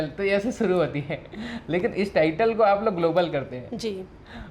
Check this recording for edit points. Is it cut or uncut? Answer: uncut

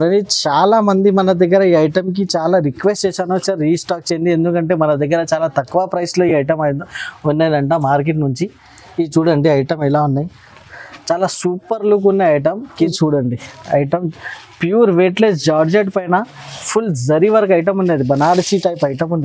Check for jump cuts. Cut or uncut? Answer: cut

